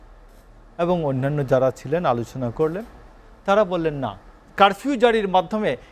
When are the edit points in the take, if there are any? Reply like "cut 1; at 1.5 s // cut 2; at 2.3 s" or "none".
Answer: cut 1; at 4.4 s